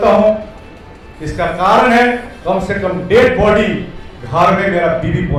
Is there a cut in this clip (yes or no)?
no